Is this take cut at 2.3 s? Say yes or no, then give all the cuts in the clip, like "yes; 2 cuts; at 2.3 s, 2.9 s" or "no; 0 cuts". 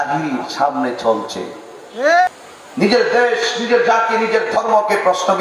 yes; 1 cut; at 2.3 s